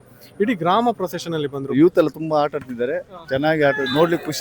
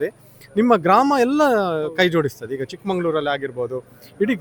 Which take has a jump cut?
first; 1 cut; at 1.7 s

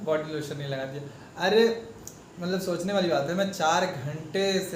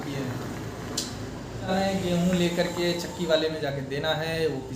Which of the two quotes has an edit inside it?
second; 1 cut; at 1.7 s

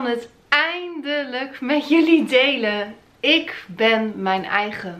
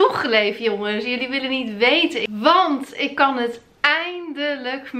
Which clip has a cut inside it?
second; 1 cut; at 2.3 s

